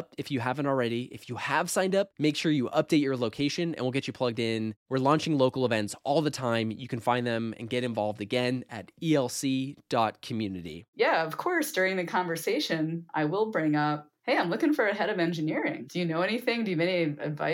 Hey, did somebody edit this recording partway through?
yes; 4 cuts; at 10.9 s, 13.0 s, 14.1 s, 15.8 s

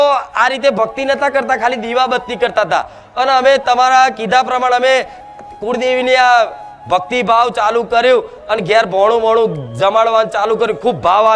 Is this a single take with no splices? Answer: yes; 0 cuts

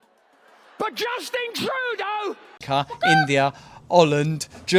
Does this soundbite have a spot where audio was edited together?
yes; 1 cut; at 2.6 s

